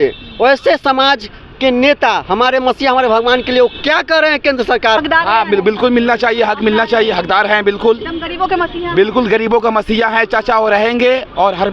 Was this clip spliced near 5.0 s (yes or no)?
yes